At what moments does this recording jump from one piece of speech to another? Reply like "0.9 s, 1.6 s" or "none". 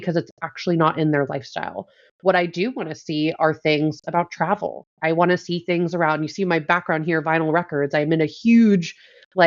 none